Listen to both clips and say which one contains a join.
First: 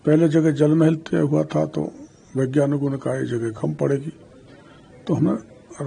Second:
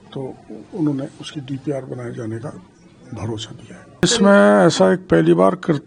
second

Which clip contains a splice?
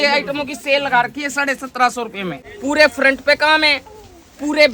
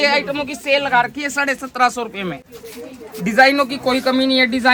first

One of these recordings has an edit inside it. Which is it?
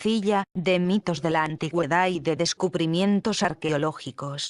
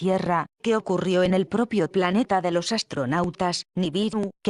first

